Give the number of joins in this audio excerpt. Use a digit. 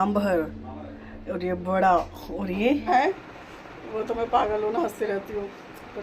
1